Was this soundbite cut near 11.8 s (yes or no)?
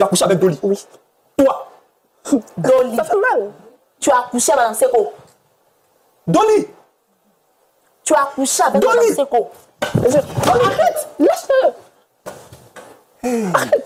no